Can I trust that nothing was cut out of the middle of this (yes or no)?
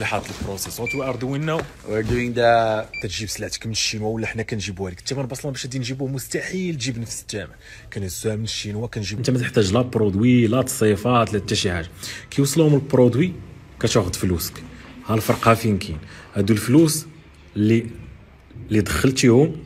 no